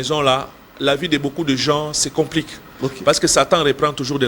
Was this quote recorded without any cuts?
yes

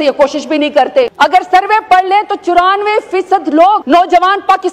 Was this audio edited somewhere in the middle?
yes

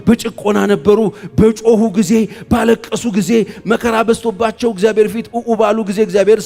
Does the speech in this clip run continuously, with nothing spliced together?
yes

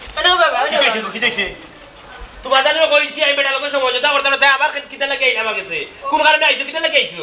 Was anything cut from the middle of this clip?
no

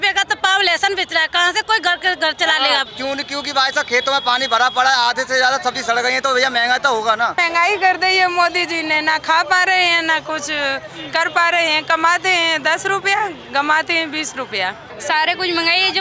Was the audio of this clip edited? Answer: yes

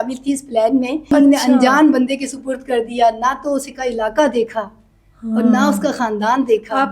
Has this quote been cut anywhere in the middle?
yes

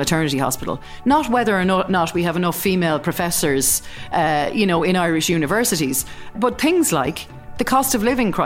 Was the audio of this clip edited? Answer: yes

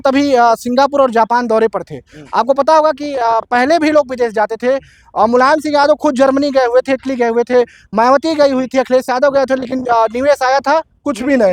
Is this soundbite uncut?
yes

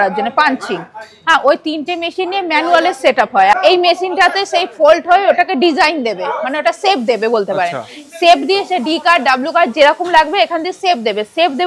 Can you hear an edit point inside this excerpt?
yes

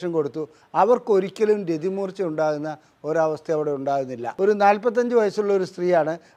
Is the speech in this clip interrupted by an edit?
yes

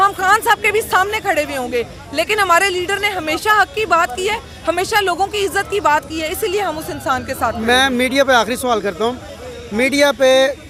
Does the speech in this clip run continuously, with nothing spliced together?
yes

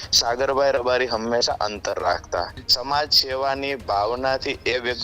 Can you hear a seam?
yes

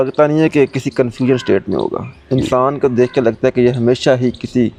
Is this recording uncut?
yes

